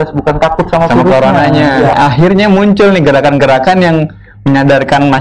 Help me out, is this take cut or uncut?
cut